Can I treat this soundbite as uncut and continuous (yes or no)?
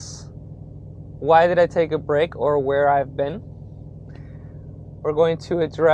yes